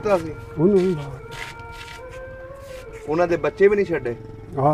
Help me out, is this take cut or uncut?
uncut